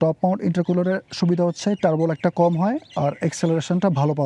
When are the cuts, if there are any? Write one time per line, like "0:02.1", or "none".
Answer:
0:01.1